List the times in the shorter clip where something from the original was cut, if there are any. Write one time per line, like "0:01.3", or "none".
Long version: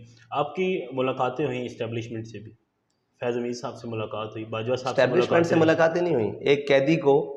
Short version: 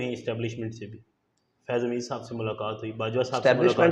none